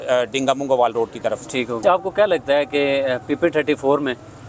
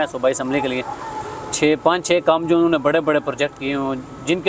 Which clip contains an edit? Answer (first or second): first